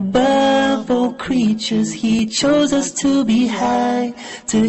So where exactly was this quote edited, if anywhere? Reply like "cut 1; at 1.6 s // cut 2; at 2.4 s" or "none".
cut 1; at 2.2 s